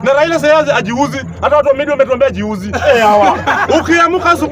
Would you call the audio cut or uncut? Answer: uncut